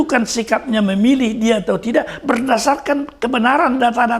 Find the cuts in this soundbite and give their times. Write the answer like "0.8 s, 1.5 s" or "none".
none